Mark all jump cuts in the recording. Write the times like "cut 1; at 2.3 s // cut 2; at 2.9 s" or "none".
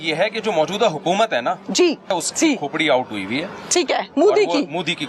cut 1; at 2.1 s